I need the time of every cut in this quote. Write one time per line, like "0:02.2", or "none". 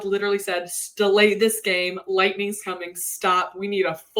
none